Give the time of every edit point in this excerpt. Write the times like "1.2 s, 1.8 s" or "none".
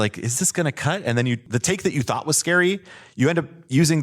1.5 s